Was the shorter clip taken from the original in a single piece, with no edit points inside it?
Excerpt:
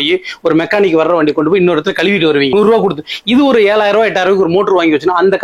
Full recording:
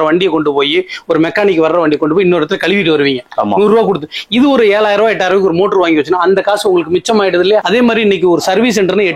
no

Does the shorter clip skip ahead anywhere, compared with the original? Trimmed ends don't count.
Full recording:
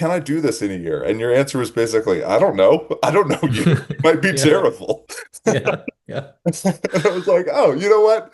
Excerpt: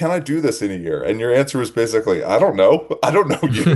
no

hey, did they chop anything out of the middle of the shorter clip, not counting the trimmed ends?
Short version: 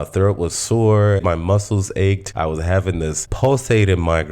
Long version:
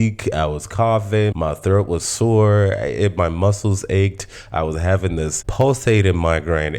yes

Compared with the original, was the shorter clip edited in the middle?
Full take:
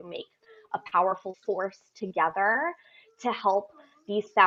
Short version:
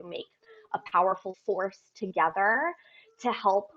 no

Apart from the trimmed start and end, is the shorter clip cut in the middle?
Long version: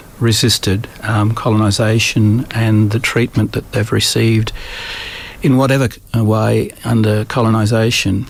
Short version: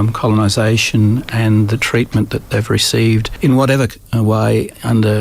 yes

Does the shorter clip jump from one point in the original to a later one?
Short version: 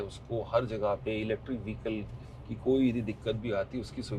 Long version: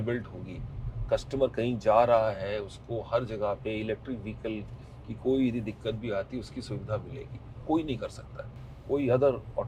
no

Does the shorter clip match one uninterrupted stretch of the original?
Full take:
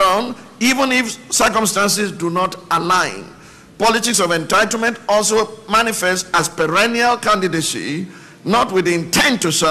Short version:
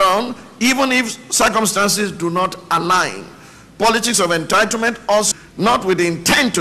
no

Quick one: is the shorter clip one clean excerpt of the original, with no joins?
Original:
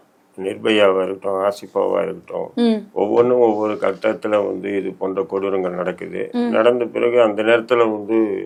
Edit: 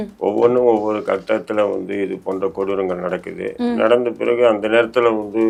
yes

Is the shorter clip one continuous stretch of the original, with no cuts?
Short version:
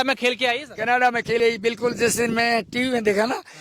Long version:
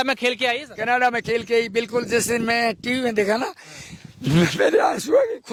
no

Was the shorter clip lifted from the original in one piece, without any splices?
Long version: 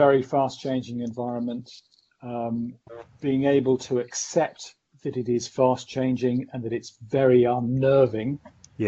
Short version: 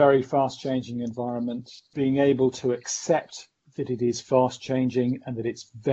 no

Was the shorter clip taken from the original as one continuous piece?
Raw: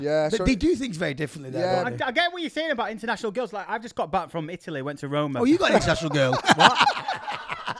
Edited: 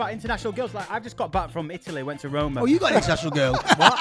yes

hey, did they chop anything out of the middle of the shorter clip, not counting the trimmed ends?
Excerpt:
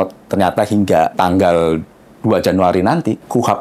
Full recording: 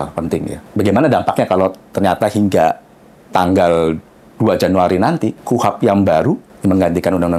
yes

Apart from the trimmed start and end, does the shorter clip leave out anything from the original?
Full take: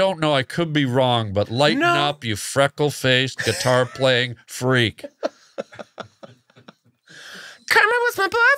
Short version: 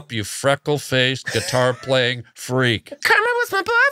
yes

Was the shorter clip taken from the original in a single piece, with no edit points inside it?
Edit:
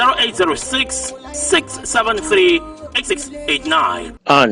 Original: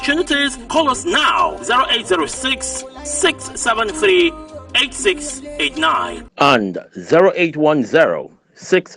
no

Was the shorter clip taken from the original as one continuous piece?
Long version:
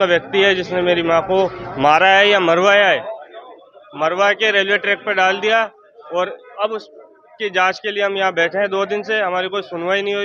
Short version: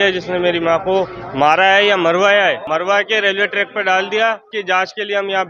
no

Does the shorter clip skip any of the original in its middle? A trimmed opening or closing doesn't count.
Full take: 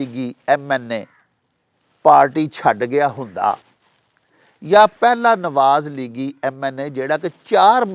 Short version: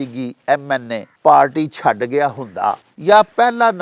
yes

